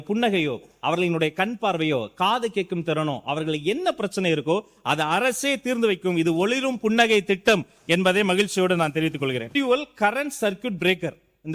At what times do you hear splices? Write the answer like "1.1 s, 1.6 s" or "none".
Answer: 9.5 s